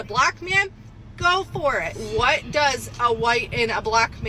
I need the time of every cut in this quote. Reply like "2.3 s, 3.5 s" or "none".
2.0 s